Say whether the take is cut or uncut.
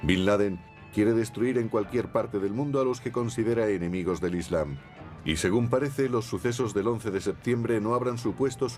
uncut